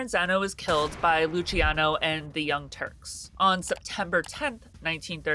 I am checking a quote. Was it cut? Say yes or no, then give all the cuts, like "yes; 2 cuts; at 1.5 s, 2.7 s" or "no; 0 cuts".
no; 0 cuts